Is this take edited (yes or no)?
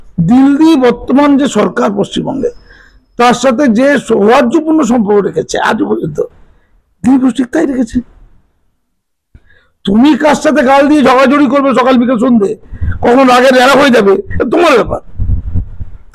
no